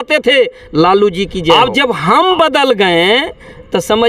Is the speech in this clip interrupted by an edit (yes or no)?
yes